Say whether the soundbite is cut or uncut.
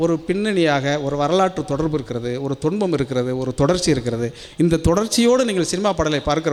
uncut